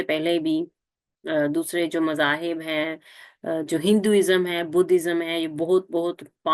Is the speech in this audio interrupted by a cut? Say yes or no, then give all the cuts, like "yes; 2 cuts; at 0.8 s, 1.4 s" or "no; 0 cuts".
no; 0 cuts